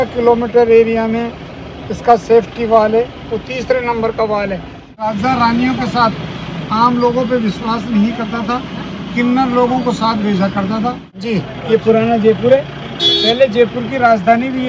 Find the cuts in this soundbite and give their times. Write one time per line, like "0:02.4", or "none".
0:05.1
0:11.1